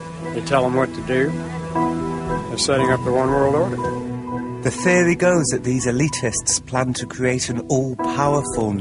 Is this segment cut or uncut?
cut